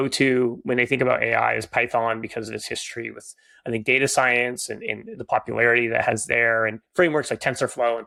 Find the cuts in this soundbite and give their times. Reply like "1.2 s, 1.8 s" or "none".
none